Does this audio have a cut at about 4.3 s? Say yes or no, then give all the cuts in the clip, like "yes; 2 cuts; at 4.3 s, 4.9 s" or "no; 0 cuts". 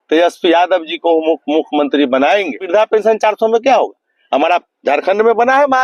no; 1 cut; at 2.6 s